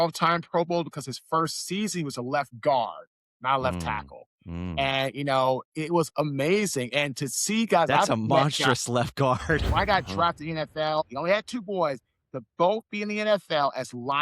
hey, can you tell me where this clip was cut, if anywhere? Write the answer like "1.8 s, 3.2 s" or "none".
9.7 s, 11.1 s

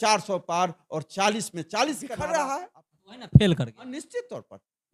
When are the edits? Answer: 2.1 s

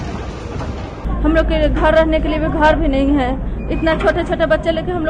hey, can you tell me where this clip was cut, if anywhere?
1.1 s

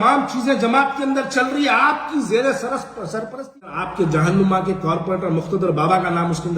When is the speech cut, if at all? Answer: 3.8 s

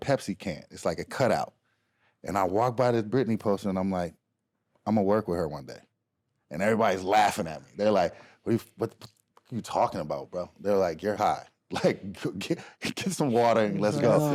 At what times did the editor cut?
none

